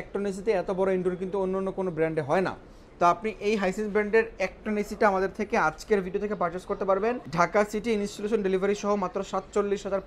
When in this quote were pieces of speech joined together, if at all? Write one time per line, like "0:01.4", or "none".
none